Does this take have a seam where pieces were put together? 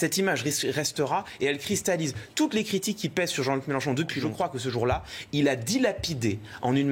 yes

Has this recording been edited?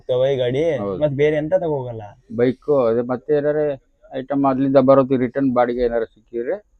no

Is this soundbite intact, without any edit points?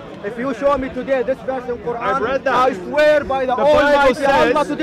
yes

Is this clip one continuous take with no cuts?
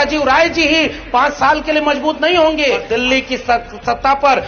no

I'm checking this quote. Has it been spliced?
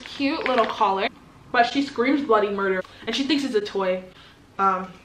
yes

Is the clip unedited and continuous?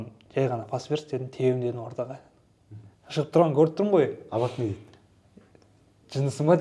yes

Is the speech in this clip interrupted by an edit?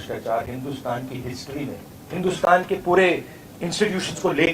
yes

